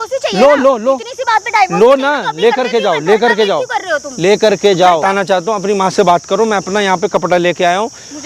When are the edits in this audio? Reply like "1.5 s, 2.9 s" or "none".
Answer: 5.0 s